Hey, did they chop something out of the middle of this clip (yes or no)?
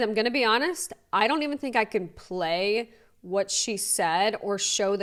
no